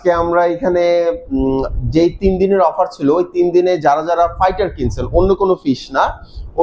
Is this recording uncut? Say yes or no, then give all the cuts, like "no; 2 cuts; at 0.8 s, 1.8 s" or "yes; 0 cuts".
yes; 0 cuts